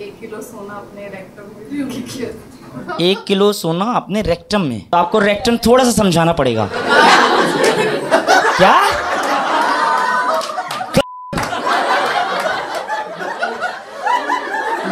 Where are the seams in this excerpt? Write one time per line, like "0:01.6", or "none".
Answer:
0:04.8